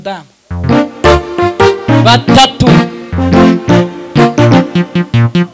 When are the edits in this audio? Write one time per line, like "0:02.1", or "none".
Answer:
none